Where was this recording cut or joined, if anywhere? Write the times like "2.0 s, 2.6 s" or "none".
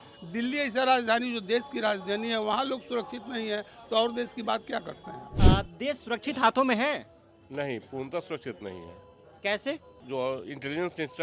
5.3 s, 9.9 s